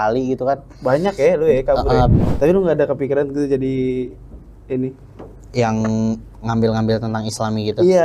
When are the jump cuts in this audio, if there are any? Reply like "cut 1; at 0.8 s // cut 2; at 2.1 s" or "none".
cut 1; at 2.2 s

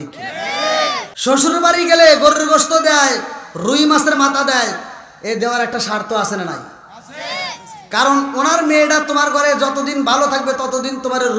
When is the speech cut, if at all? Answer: cut 1; at 1.1 s

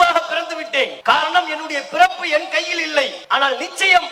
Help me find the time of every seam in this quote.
cut 1; at 1.0 s // cut 2; at 3.2 s

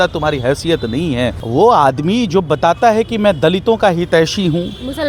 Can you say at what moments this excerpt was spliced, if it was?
cut 1; at 1.4 s

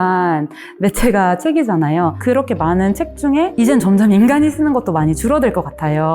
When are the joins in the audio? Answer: cut 1; at 2.2 s

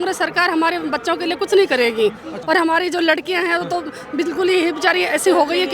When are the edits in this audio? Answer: cut 1; at 2.3 s

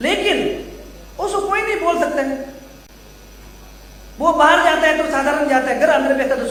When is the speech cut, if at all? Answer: none

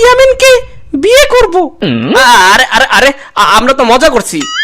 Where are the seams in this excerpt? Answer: cut 1; at 2.0 s

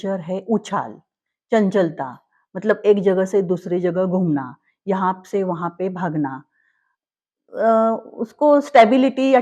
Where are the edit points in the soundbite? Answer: none

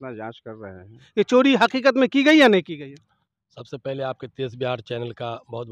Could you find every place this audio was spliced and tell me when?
cut 1; at 1.0 s

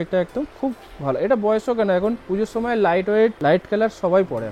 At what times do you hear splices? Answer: cut 1; at 2.2 s // cut 2; at 3.4 s

